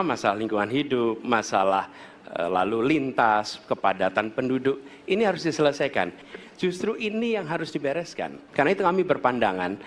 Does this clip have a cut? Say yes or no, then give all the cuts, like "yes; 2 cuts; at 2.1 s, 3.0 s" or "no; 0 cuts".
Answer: yes; 2 cuts; at 6.2 s, 8.3 s